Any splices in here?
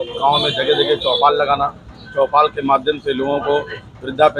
no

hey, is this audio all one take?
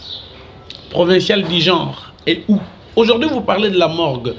no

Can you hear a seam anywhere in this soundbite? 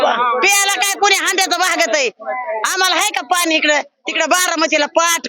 no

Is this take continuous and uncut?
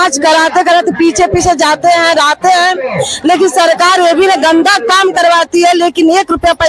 yes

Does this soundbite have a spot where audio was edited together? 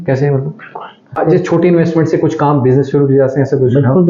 yes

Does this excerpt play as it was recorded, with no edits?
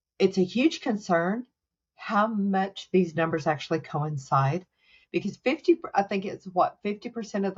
yes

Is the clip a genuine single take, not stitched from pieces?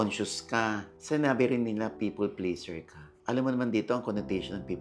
yes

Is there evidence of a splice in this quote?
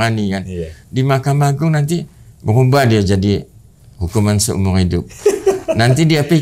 no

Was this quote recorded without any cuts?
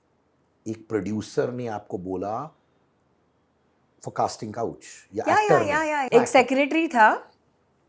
no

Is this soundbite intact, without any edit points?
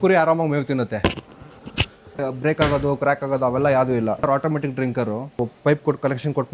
no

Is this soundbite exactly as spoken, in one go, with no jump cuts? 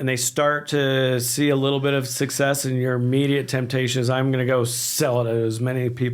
yes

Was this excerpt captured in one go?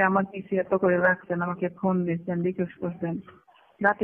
yes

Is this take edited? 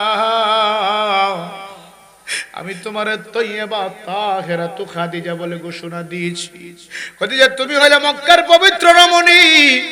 no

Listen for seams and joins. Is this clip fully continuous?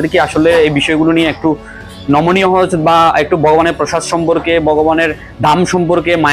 yes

